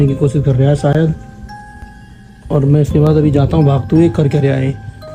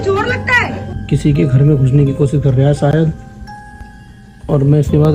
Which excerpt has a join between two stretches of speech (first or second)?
second